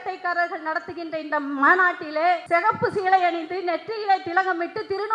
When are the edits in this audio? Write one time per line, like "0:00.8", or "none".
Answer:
0:02.4